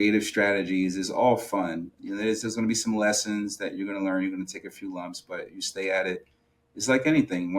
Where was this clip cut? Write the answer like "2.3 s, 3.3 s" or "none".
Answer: 2.0 s

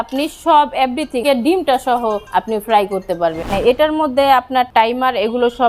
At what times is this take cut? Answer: 1.2 s, 2.2 s, 3.5 s, 4.7 s

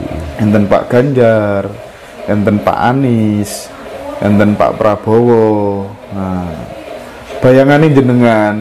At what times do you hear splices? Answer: none

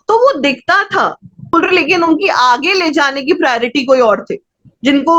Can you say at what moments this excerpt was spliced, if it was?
1.5 s

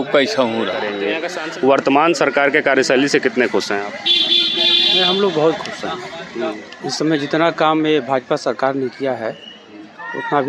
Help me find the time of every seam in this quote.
1.0 s

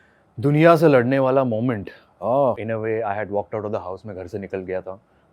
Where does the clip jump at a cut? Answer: 2.6 s

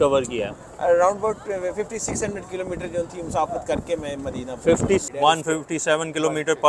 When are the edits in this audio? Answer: 5.1 s

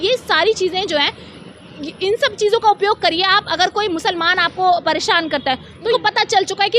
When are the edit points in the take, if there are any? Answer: 5.9 s

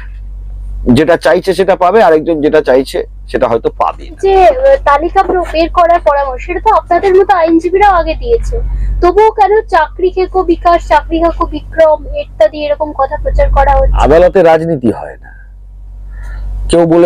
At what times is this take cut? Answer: 4.2 s, 13.9 s

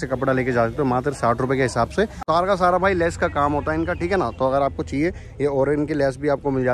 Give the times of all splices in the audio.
2.2 s

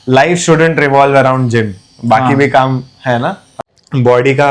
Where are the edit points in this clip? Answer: 3.4 s

